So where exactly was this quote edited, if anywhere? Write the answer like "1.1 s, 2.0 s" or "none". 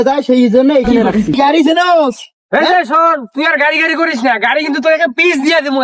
1.4 s